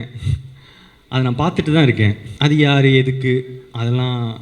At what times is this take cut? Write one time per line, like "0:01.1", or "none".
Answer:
0:02.3